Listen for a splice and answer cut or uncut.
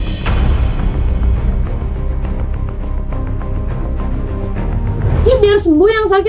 cut